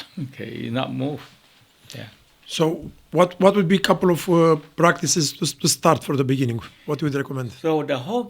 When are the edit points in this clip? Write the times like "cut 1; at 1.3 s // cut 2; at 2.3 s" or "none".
none